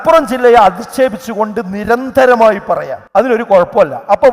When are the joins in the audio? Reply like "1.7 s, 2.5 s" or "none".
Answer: 3.3 s